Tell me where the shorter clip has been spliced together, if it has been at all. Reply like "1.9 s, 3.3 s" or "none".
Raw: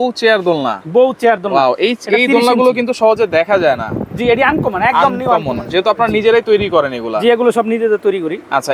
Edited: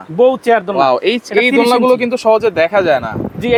none